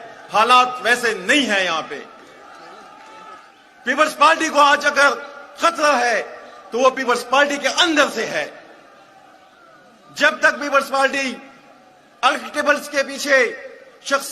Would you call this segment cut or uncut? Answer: cut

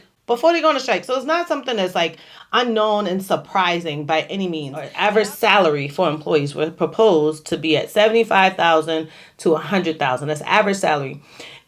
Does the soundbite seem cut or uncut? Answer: cut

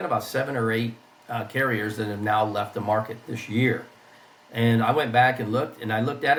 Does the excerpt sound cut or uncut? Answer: uncut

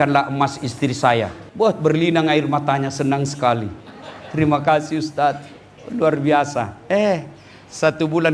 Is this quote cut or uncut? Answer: cut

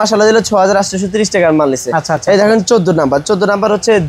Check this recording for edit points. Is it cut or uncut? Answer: uncut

